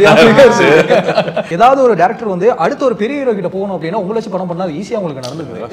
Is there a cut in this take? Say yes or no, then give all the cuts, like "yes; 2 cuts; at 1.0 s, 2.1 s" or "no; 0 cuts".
yes; 1 cut; at 1.5 s